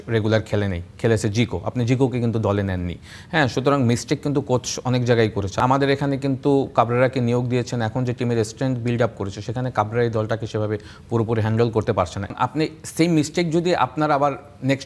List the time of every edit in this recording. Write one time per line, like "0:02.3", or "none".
0:05.5
0:12.3